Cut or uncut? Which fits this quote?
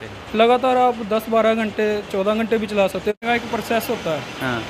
cut